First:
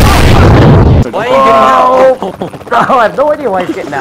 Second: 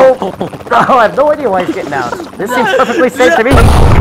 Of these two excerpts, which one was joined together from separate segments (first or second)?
first